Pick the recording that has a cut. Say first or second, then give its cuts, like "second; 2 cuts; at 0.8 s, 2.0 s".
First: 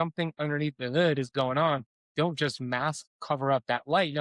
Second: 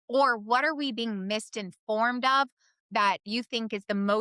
first; 1 cut; at 2.0 s